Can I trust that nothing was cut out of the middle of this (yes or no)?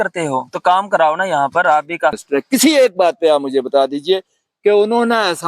no